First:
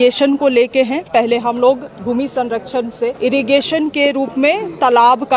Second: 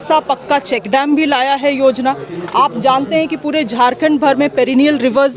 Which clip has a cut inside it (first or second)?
first